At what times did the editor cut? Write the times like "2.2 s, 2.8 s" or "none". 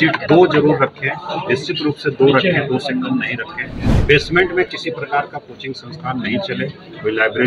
none